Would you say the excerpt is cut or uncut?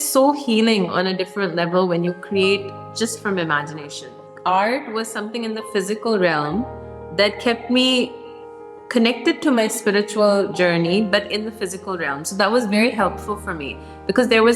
cut